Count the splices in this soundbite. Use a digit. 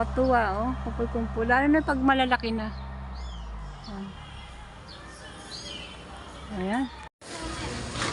1